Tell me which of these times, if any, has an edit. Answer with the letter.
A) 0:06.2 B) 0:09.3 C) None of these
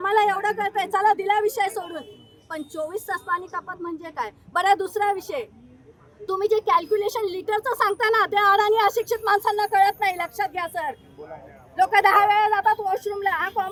C